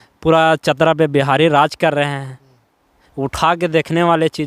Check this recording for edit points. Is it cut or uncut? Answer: uncut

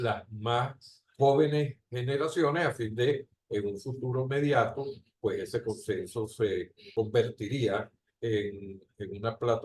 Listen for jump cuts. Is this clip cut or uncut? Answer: cut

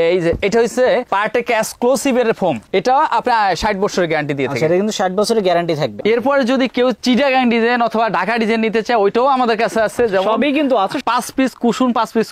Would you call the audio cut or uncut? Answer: cut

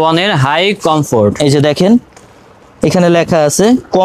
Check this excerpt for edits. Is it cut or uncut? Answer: uncut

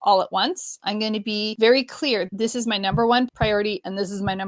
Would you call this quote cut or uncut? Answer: cut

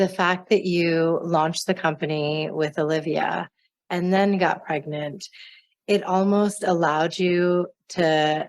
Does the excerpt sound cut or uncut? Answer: uncut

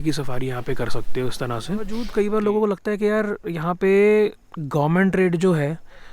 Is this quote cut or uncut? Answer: cut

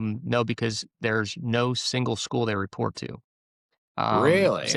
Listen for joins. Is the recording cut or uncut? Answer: uncut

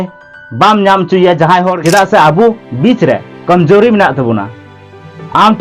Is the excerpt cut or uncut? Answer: cut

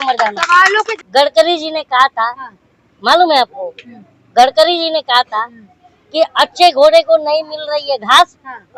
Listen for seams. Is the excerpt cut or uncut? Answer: cut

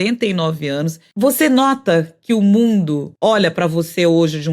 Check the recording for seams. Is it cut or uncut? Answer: cut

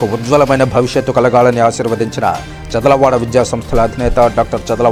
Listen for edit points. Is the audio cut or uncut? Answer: uncut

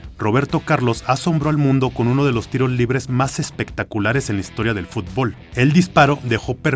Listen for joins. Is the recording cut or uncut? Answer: cut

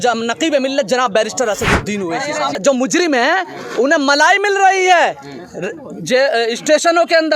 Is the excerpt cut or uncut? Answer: cut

